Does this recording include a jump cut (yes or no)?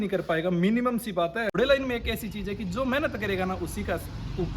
yes